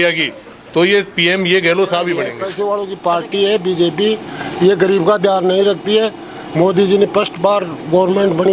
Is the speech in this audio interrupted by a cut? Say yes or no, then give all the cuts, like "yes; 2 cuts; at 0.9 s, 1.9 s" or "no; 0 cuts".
yes; 1 cut; at 2.4 s